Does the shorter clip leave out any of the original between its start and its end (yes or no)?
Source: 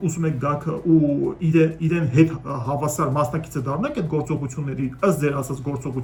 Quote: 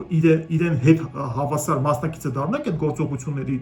no